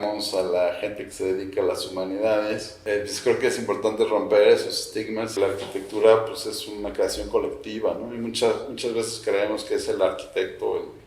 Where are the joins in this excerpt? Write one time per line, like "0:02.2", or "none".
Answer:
0:02.8
0:05.4